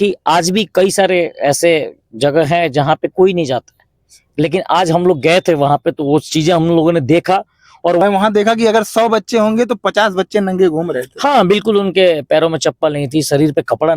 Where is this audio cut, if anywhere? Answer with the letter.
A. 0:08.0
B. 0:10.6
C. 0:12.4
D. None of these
A